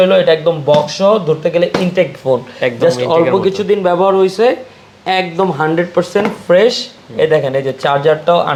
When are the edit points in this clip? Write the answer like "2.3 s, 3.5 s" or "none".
none